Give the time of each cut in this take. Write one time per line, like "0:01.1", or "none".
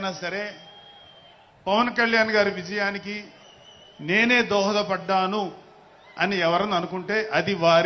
none

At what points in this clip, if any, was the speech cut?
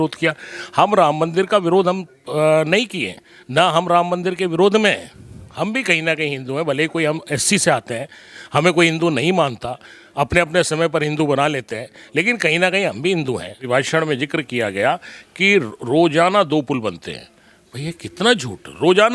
0:13.7

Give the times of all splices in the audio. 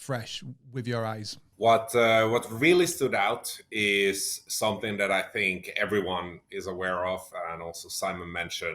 0:01.4

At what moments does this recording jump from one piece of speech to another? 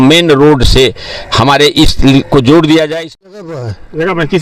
0:03.3

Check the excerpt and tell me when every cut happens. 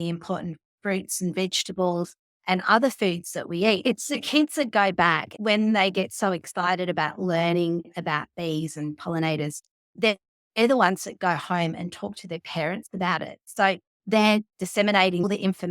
0:03.8
0:05.3

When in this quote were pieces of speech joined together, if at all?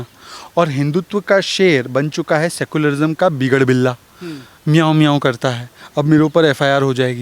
none

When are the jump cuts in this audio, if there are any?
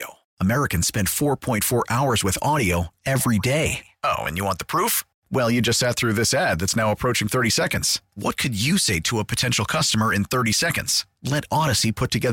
none

